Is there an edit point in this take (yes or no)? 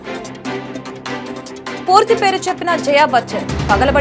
yes